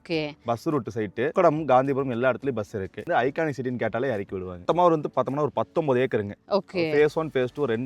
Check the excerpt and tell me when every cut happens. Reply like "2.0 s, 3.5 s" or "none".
1.3 s, 3.0 s, 4.6 s